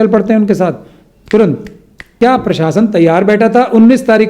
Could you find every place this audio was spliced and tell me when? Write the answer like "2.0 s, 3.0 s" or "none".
2.2 s